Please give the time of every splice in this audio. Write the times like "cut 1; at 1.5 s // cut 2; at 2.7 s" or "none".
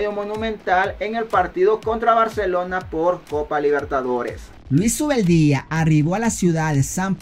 none